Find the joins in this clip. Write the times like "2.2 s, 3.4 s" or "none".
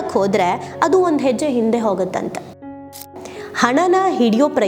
3.0 s